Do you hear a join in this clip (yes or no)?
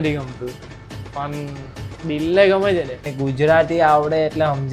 yes